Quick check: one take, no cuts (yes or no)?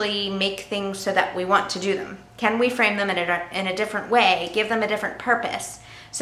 yes